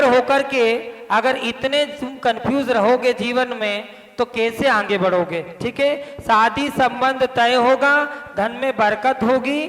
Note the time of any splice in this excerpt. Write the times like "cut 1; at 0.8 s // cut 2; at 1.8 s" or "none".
none